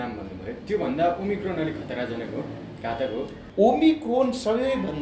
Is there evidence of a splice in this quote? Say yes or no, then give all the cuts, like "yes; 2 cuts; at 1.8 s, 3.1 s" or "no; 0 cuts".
yes; 1 cut; at 3.4 s